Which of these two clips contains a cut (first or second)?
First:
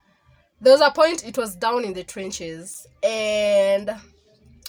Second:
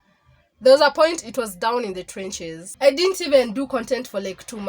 second